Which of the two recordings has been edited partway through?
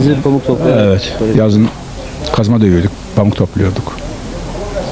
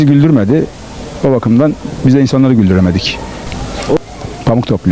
second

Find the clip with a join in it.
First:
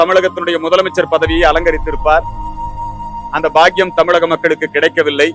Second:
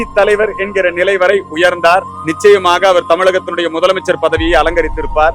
second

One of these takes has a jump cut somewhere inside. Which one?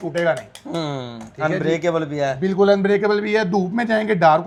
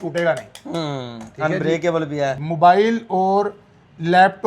second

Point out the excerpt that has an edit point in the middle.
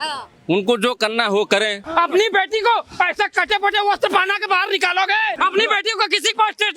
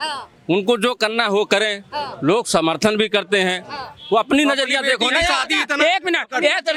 first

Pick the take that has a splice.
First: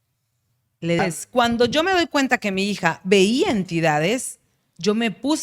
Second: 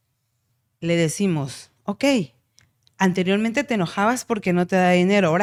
first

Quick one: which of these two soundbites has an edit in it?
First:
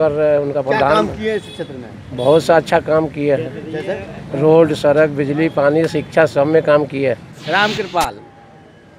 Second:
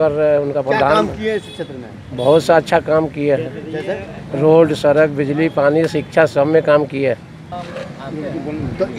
first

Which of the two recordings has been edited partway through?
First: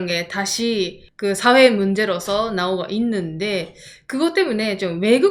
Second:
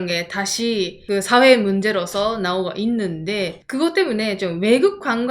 second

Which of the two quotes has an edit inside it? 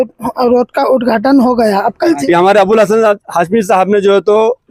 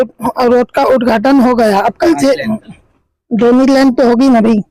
first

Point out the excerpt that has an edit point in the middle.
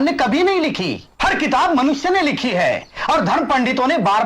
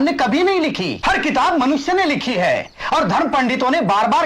second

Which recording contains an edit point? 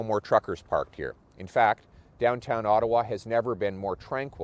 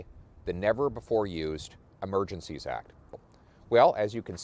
second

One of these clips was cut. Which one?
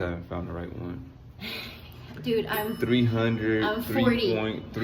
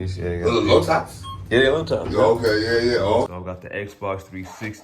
second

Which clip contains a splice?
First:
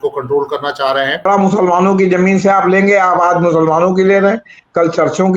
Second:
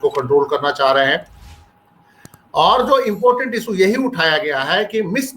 first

